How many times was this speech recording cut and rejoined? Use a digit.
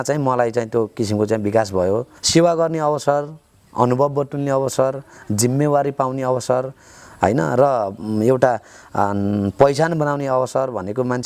1